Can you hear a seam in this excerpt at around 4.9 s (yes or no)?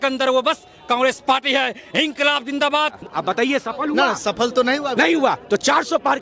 no